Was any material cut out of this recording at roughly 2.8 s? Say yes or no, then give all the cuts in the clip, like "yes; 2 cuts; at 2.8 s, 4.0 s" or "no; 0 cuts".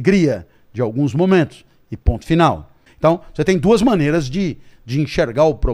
yes; 1 cut; at 2.8 s